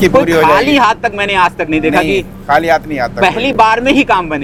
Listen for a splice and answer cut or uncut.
uncut